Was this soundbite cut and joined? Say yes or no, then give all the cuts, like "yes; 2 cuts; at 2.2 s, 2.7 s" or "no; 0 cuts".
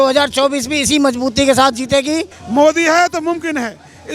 yes; 1 cut; at 2.4 s